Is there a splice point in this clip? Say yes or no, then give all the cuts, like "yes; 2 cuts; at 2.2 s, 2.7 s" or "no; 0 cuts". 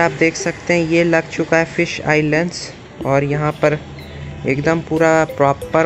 no; 0 cuts